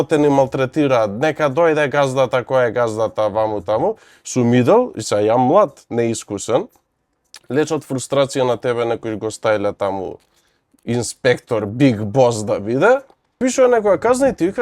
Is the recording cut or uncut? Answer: cut